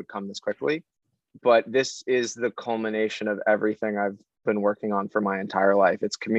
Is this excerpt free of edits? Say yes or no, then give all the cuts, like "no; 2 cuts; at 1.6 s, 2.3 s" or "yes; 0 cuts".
yes; 0 cuts